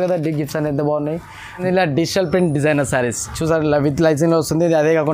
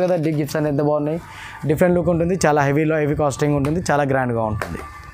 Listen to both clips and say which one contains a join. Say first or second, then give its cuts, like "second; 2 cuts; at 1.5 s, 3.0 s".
first; 1 cut; at 1.6 s